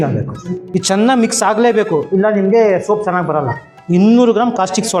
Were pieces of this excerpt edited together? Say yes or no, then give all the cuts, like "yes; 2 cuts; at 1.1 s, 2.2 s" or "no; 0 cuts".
no; 0 cuts